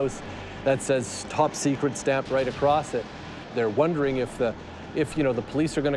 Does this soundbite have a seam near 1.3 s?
no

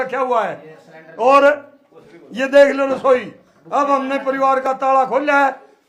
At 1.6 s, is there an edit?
no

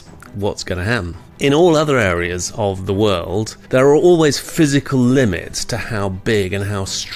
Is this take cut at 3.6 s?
yes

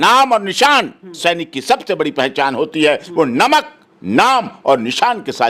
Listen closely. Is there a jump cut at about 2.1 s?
no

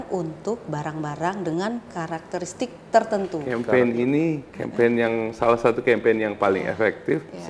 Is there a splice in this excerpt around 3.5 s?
yes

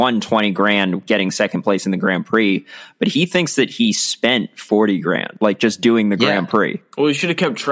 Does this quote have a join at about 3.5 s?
no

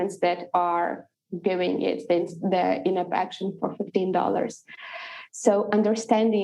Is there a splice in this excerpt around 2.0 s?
no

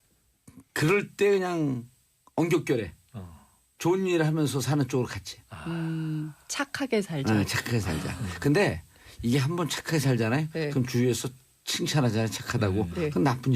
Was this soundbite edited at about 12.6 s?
no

